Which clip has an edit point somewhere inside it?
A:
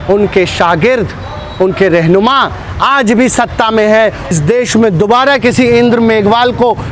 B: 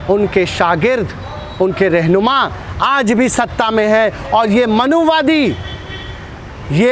A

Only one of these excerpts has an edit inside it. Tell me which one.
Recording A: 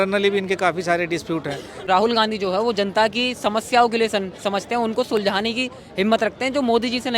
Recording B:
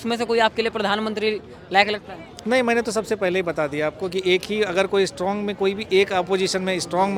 A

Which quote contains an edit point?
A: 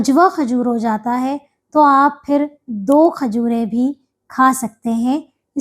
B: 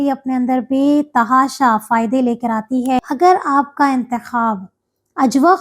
B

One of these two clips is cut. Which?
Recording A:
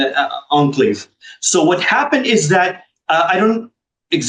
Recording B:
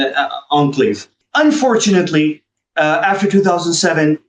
B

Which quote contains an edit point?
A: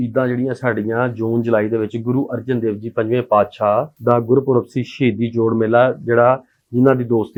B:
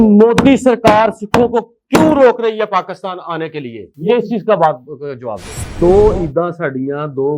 B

